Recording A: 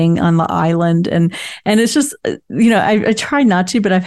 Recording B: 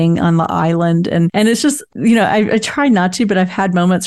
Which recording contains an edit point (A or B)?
B